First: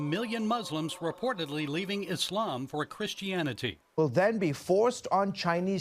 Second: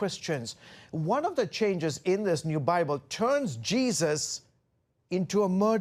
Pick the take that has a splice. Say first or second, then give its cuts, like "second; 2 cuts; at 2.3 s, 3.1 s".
first; 1 cut; at 4.0 s